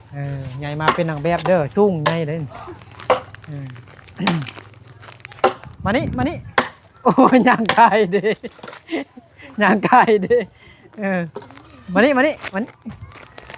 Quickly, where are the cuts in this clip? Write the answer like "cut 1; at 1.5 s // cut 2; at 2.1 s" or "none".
none